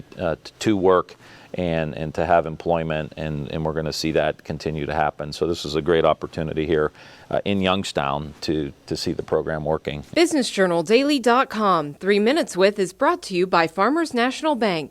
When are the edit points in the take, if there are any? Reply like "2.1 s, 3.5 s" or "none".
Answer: 10.0 s